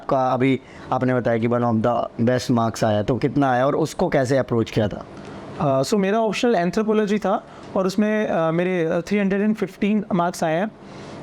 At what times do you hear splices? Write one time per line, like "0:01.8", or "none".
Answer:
none